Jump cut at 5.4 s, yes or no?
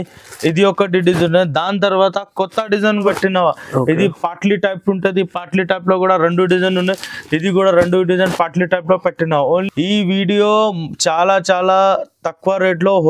no